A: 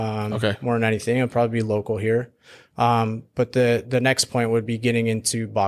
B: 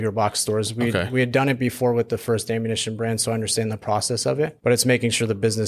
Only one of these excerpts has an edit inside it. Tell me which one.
B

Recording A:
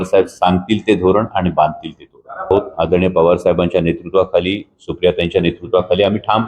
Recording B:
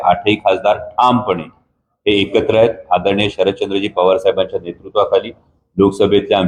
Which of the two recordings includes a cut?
A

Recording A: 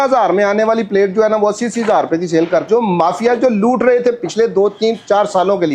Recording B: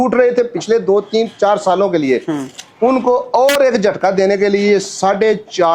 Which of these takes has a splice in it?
A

